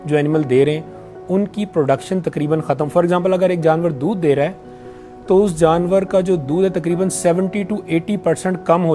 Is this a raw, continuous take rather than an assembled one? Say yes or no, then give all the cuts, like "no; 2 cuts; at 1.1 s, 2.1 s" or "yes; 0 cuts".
yes; 0 cuts